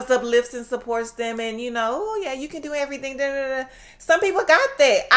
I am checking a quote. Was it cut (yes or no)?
no